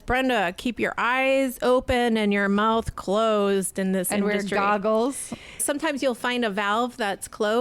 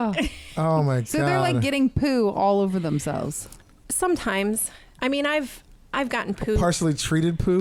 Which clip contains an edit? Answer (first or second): first